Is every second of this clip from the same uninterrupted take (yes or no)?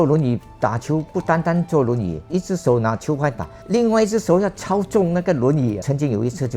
no